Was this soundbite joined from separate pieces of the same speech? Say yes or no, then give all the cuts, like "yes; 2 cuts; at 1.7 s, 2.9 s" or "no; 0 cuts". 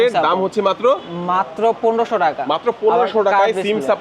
no; 0 cuts